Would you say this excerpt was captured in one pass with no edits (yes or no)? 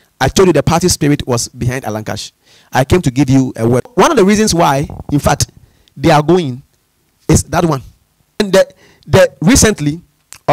no